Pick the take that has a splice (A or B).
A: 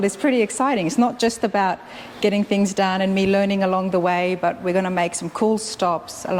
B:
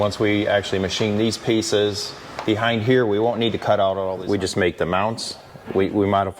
B